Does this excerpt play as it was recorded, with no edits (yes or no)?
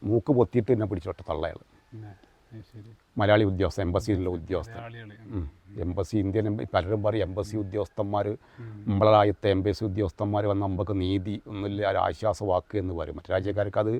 yes